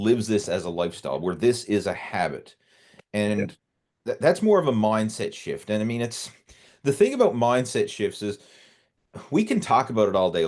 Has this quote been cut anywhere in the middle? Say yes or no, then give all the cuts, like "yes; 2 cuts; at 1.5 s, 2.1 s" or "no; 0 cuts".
no; 0 cuts